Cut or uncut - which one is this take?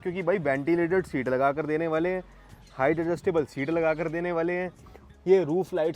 uncut